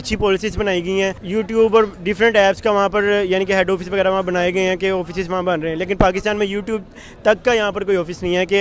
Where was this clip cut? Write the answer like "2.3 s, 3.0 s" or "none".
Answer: 1.2 s

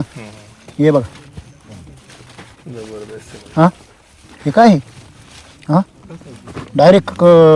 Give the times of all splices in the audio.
none

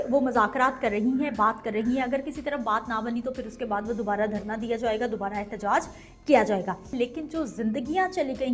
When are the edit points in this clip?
6.9 s

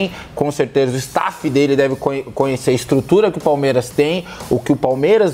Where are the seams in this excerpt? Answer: none

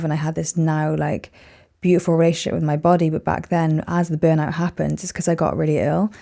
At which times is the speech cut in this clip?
none

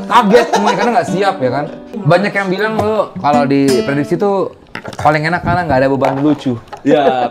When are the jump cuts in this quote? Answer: 1.8 s

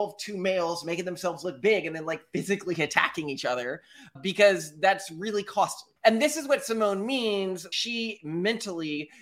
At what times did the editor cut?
6.0 s, 7.6 s

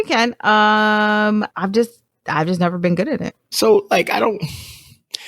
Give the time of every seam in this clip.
1.5 s

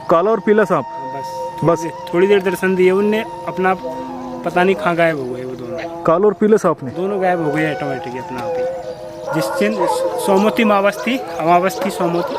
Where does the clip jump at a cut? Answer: 9.3 s

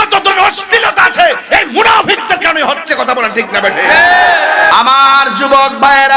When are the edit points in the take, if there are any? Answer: 4.7 s

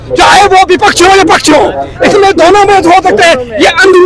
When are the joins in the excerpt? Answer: none

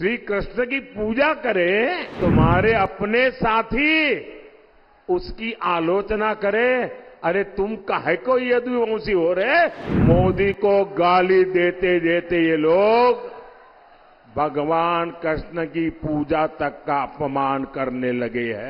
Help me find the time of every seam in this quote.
2.1 s, 9.9 s

